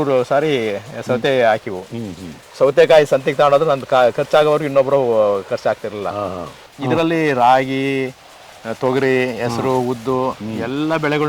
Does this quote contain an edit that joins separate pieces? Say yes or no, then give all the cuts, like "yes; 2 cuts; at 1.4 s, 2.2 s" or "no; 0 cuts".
yes; 1 cut; at 6.7 s